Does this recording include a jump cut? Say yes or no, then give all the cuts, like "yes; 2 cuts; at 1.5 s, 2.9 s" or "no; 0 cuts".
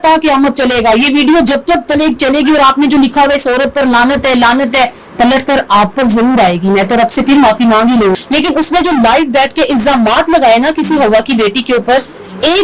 yes; 1 cut; at 8.2 s